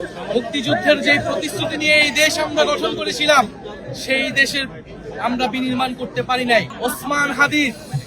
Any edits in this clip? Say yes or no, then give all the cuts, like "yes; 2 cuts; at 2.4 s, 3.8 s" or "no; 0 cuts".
yes; 1 cut; at 6.7 s